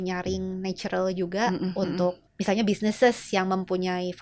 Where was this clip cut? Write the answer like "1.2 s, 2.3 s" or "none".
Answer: 2.3 s